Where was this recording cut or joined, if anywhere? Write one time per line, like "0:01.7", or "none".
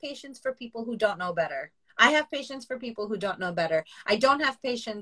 0:01.8